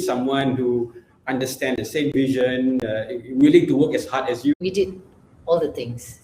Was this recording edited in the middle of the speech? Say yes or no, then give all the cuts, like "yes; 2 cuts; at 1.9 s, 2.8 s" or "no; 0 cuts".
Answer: yes; 1 cut; at 4.6 s